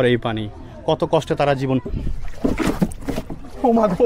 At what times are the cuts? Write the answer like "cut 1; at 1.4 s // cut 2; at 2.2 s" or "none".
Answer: none